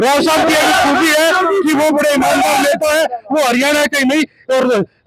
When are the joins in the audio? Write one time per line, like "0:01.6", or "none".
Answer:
none